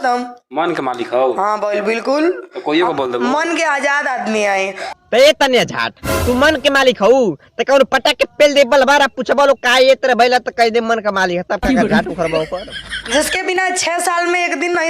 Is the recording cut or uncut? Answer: uncut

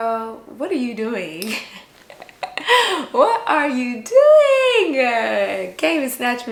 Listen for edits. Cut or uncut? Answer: uncut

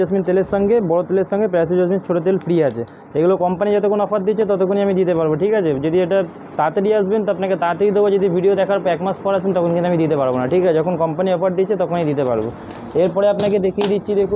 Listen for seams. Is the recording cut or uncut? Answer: uncut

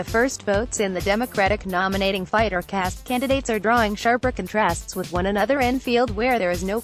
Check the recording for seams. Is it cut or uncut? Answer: uncut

